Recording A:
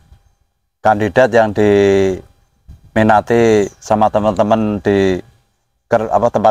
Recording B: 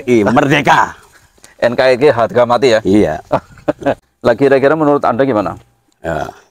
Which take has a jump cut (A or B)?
B